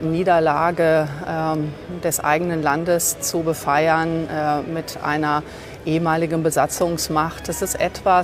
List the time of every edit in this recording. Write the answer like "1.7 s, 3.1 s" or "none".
none

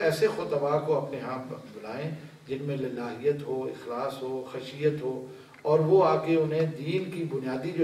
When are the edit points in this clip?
none

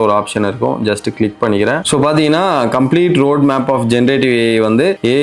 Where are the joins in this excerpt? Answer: none

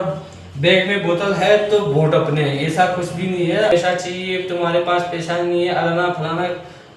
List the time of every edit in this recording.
3.7 s

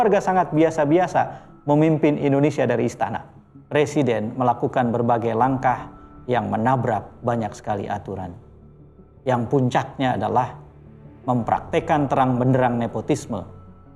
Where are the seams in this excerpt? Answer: 3.7 s

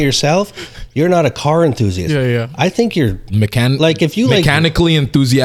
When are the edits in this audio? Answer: 3.3 s

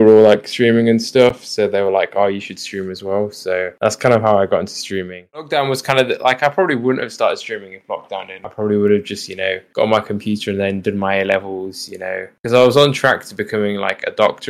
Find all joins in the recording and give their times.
5.5 s

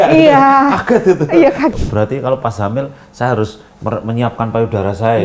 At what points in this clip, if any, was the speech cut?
1.7 s

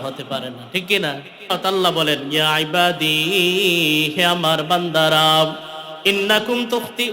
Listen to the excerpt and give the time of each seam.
1.5 s

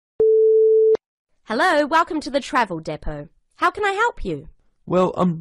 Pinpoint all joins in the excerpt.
1.0 s

